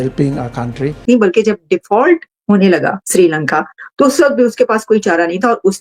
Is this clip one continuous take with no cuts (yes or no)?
no